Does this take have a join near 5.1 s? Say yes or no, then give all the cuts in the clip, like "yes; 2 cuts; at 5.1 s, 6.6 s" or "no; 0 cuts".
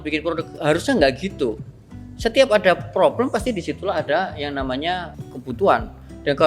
yes; 1 cut; at 5.1 s